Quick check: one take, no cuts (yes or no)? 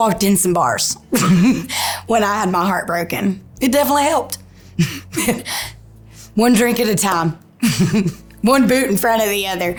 yes